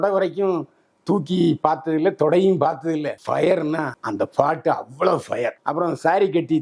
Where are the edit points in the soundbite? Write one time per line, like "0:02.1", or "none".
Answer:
0:03.1
0:05.6